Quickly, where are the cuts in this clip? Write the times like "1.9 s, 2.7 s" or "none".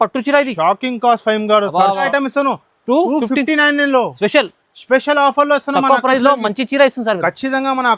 2.0 s